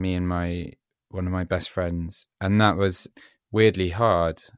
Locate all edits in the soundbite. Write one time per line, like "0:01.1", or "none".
0:03.0